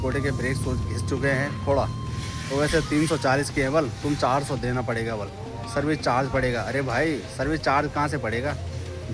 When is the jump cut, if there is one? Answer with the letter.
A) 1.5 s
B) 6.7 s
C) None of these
C